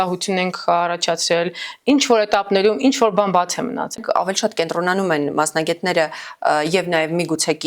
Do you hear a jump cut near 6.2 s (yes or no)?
no